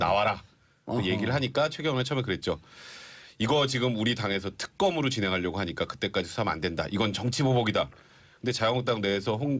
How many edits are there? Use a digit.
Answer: 1